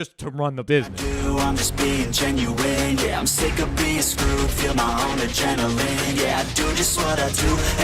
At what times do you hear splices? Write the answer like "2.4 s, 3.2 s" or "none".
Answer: 0.9 s